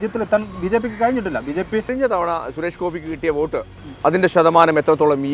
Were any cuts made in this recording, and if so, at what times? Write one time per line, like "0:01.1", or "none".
0:02.0